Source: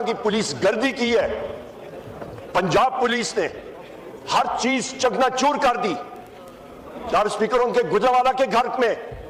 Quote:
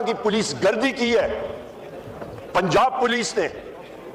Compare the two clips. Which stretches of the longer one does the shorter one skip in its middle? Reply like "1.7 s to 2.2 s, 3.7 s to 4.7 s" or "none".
none